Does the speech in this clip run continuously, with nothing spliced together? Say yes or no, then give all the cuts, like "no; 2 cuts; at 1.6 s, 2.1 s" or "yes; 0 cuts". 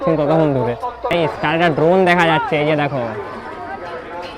no; 1 cut; at 0.9 s